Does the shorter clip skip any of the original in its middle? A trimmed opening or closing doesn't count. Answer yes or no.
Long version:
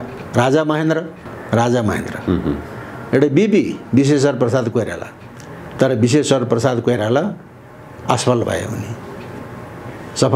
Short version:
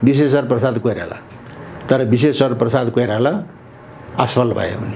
no